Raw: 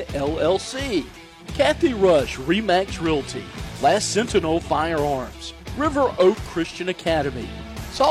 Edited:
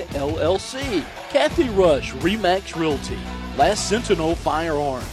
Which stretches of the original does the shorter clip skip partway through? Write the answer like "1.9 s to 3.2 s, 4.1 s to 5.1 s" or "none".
1.2 s to 1.4 s